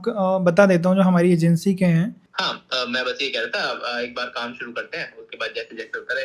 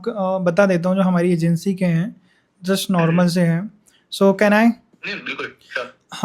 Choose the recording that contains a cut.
first; 1 cut; at 2.6 s

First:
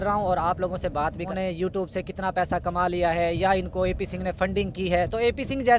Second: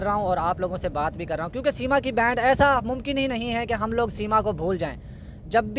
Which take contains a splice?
first; 1 cut; at 1.3 s

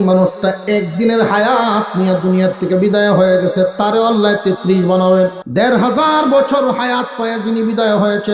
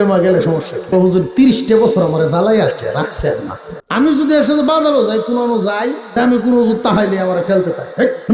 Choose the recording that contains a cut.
first; 1 cut; at 5.4 s

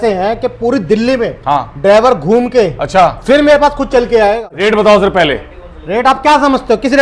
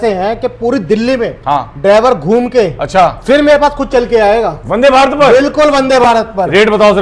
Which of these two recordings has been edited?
first; 1 cut; at 4.5 s

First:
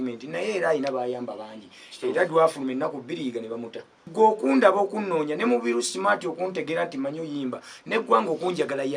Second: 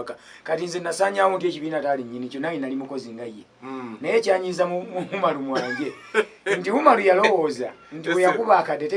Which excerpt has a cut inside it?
first; 1 cut; at 4.1 s

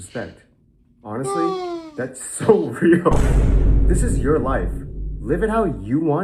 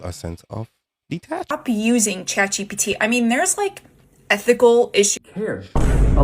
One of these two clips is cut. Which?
second; 2 cuts; at 1.5 s, 5.2 s

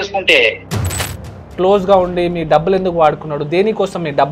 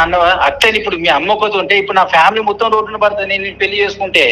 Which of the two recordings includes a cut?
first; 1 cut; at 1.5 s

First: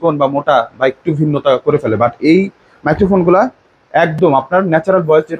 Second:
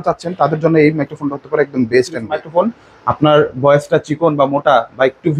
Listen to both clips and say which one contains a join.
second; 1 cut; at 2.2 s

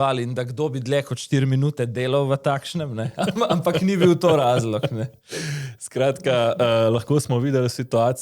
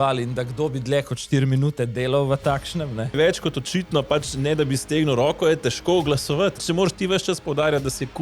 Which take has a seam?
second; 2 cuts; at 3.1 s, 6.6 s

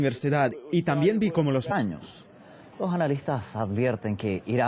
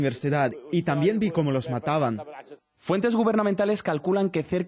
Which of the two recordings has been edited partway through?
second; 1 cut; at 1.7 s

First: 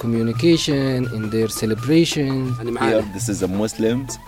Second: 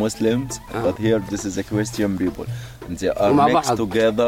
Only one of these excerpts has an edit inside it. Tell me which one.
first; 1 cut; at 2.7 s

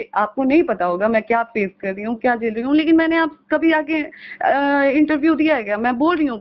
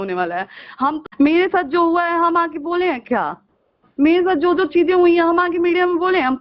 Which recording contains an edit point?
second; 1 cut; at 1.0 s

